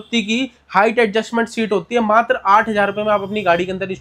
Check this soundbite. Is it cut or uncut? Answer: uncut